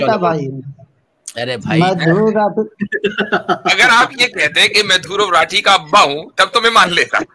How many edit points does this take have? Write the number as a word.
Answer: zero